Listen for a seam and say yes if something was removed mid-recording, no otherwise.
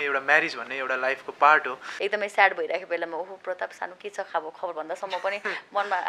yes